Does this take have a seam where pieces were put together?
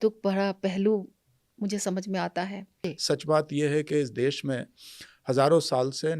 yes; 1 cut; at 2.9 s

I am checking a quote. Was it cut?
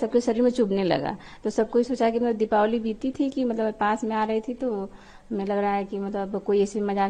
no; 0 cuts

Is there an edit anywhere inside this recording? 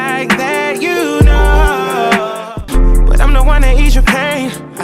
no; 0 cuts

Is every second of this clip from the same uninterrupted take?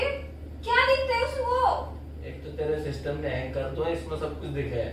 yes; 0 cuts

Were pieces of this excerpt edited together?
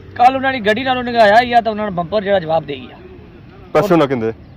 no; 0 cuts

